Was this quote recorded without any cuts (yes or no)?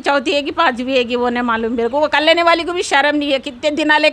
yes